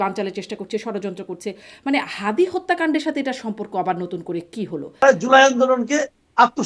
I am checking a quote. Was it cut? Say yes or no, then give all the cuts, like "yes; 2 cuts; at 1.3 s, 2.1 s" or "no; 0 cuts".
yes; 1 cut; at 5.0 s